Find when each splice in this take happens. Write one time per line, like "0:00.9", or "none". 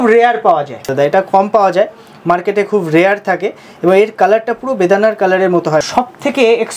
0:00.9
0:05.9

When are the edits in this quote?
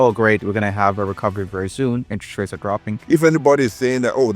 0:02.9

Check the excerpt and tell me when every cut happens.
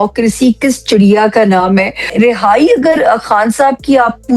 0:02.1

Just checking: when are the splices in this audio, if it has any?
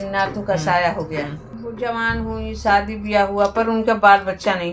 0:01.4

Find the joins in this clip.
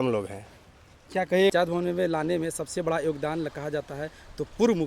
0:01.5

